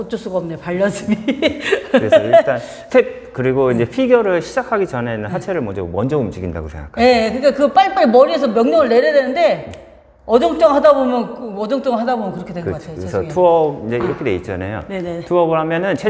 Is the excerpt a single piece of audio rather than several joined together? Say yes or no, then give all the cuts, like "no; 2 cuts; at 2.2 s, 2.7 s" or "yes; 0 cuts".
no; 1 cut; at 2.7 s